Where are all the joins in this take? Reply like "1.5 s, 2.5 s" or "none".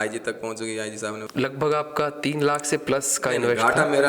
1.2 s